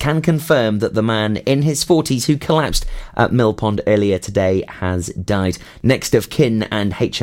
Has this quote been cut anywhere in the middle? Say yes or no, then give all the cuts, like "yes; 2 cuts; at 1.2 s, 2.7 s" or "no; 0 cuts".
yes; 1 cut; at 5.7 s